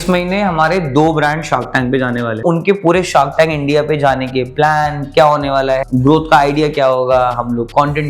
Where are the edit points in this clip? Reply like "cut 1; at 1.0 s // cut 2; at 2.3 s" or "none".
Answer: cut 1; at 2.4 s // cut 2; at 5.8 s